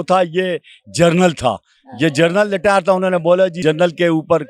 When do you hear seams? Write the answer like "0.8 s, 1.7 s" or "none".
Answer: 3.6 s